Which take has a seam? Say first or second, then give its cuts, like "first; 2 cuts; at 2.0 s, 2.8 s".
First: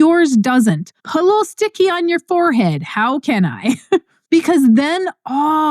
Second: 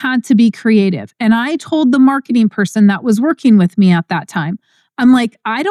first; 2 cuts; at 0.9 s, 4.1 s